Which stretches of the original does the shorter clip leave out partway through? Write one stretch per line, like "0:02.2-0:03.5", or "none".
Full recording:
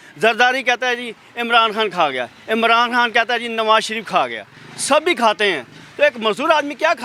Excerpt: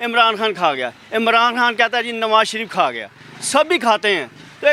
none